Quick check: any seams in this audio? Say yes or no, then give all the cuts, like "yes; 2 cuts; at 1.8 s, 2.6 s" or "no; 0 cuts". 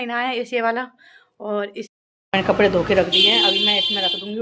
yes; 1 cut; at 1.9 s